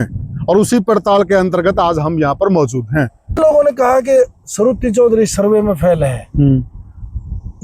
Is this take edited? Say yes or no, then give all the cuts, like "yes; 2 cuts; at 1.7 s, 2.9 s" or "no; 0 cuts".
yes; 1 cut; at 3.4 s